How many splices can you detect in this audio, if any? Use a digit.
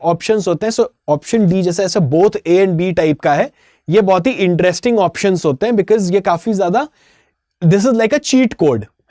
0